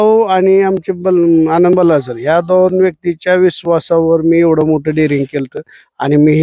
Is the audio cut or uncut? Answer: uncut